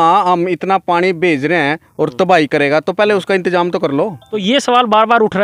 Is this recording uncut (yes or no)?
no